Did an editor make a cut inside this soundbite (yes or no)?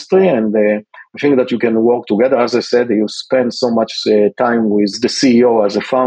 yes